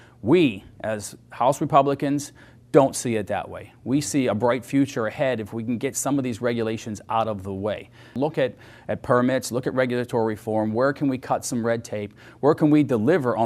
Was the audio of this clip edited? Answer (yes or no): yes